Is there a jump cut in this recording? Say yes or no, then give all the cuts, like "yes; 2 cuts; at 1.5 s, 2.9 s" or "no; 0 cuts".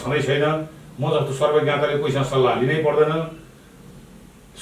no; 0 cuts